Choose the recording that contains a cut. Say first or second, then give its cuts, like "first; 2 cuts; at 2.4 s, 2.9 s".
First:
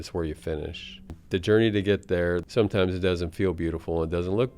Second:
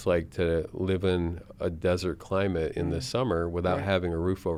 first; 2 cuts; at 1.2 s, 2.4 s